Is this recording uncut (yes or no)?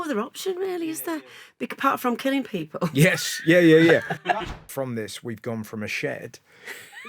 no